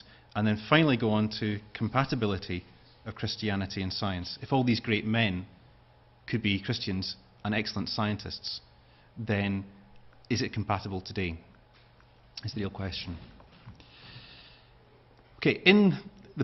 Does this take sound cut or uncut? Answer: cut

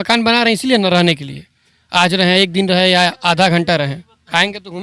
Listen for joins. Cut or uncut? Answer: uncut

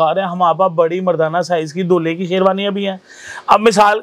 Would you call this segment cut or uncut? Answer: uncut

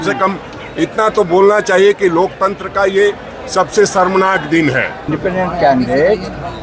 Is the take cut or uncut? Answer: cut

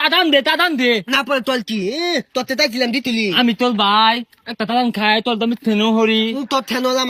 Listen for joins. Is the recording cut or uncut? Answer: uncut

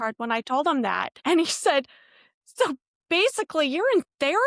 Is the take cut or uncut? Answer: cut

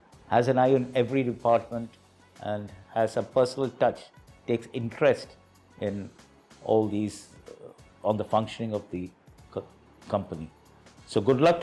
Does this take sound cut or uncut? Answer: uncut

